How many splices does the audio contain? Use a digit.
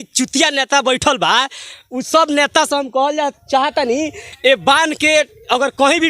1